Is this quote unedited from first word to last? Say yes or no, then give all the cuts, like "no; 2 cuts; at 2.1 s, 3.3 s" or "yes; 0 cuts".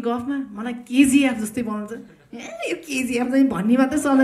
yes; 0 cuts